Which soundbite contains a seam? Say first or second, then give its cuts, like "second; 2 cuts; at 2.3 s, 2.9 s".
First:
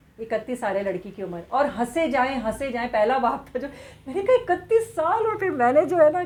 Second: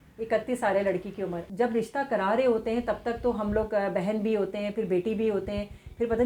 second; 1 cut; at 1.4 s